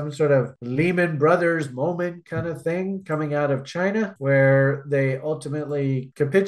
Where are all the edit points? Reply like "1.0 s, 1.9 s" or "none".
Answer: none